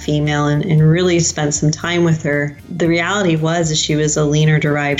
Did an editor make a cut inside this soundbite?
yes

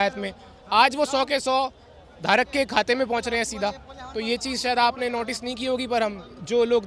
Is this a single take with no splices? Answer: yes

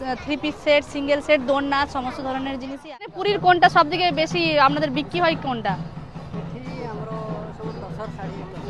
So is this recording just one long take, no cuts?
no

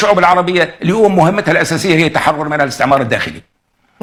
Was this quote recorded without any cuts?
yes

